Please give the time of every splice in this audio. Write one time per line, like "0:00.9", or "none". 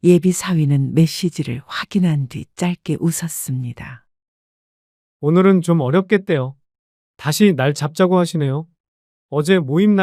none